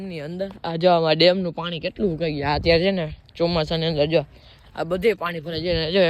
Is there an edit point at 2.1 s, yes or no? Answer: no